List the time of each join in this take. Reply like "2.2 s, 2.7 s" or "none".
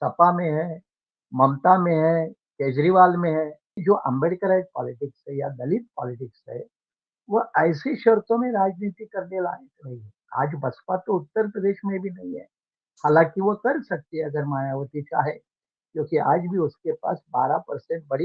3.8 s